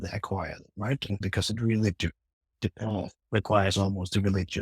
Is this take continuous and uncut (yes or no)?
no